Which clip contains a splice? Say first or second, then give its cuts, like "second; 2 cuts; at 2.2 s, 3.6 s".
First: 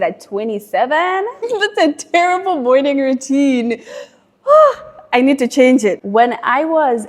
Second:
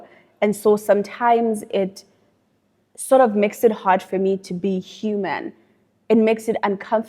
first; 2 cuts; at 1.4 s, 6.0 s